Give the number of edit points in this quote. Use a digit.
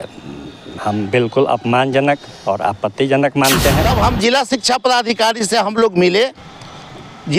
1